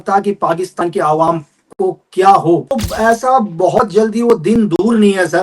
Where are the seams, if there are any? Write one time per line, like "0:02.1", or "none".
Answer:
0:02.8